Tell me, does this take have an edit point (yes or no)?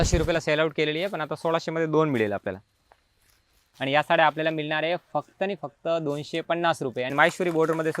yes